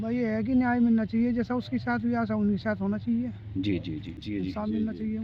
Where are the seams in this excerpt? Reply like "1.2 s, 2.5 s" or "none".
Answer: 4.1 s